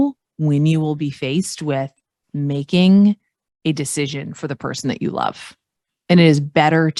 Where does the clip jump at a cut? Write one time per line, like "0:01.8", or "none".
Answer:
none